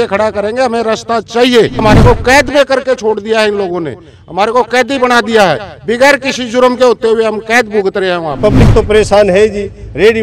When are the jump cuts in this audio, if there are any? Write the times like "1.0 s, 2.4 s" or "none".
1.8 s, 8.4 s